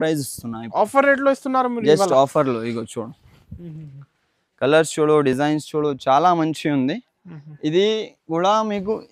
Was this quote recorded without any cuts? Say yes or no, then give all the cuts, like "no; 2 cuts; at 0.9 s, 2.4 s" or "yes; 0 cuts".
yes; 0 cuts